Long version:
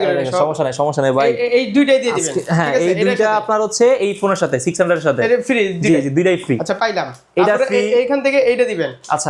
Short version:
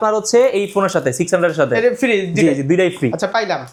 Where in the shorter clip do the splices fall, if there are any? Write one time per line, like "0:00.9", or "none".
none